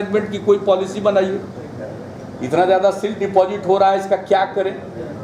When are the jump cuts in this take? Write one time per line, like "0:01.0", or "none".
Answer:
none